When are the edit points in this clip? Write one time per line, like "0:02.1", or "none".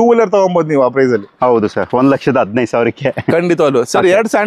none